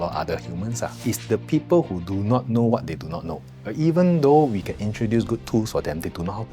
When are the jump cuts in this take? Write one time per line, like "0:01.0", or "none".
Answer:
0:01.0
0:03.6